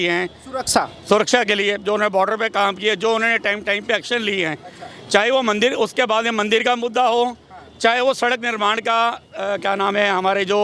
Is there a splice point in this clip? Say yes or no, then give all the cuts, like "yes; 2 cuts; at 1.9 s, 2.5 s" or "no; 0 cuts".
no; 0 cuts